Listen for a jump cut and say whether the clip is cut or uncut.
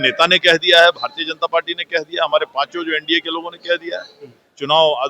uncut